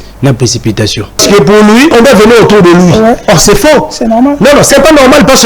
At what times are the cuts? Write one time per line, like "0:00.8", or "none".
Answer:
0:01.2
0:01.9
0:03.2